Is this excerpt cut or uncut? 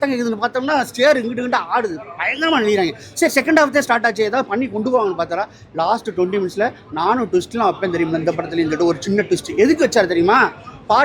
uncut